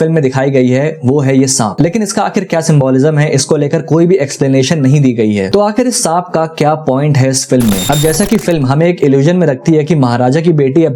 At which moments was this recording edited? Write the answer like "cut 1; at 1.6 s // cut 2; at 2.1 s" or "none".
cut 1; at 7.8 s